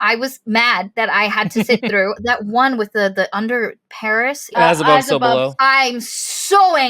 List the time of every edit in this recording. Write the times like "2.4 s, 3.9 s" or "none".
0.9 s, 2.2 s, 4.5 s